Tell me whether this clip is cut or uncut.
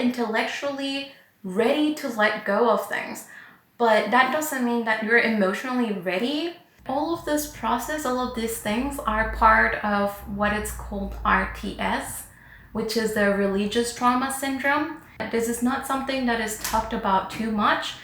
cut